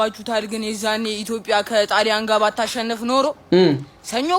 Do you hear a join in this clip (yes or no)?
no